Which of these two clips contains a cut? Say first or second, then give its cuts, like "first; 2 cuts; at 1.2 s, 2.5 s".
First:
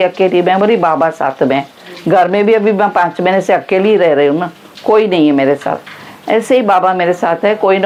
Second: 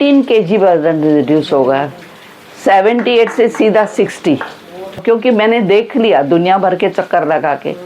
second; 1 cut; at 5.0 s